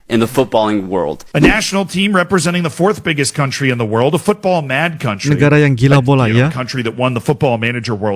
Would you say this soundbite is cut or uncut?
cut